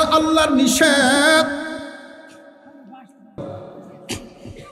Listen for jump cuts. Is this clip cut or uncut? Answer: uncut